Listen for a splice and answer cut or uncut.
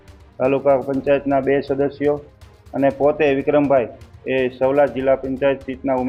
uncut